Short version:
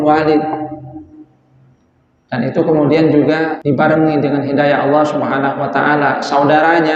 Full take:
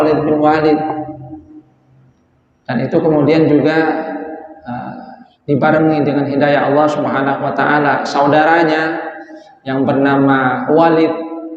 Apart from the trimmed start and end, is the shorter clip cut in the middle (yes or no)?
yes